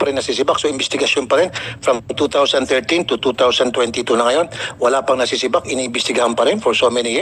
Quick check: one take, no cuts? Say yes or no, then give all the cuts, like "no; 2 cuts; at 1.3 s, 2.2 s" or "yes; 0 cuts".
yes; 0 cuts